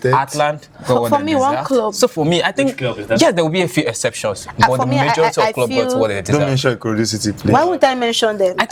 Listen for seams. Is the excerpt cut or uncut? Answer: uncut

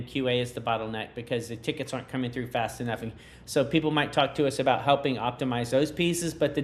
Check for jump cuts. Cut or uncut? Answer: uncut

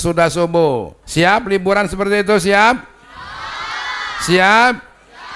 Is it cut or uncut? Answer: cut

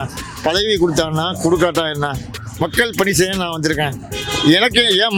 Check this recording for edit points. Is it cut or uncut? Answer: uncut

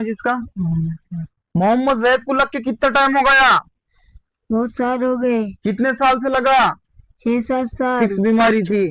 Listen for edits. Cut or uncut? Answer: cut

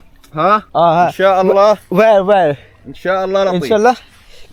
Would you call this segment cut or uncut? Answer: uncut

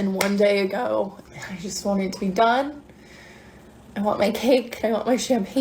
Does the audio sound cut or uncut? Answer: cut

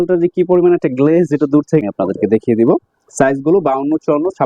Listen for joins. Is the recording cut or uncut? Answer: cut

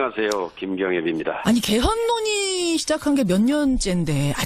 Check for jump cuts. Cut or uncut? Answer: uncut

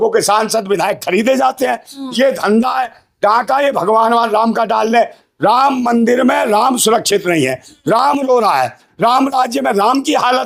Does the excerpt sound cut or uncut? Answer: uncut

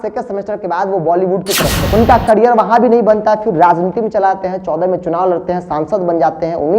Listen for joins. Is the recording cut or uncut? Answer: cut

